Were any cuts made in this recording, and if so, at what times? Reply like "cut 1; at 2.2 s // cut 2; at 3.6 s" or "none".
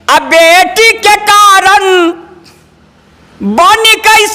none